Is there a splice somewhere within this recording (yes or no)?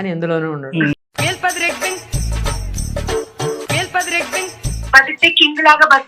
yes